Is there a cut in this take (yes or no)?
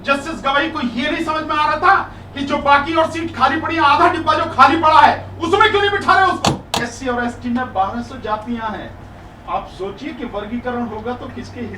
yes